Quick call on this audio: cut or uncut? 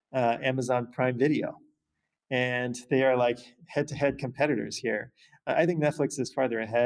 uncut